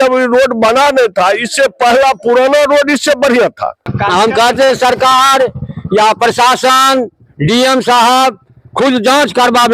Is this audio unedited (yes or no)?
no